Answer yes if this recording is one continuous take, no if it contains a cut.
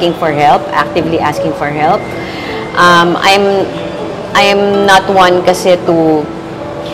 yes